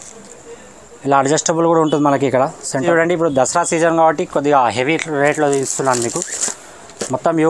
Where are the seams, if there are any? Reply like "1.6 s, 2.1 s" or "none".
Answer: 2.8 s